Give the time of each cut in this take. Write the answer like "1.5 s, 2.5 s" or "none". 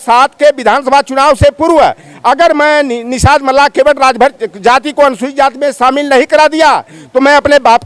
none